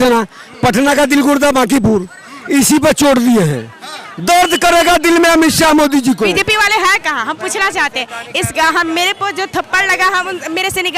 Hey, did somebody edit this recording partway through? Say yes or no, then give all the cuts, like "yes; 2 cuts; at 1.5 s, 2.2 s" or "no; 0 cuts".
yes; 1 cut; at 6.3 s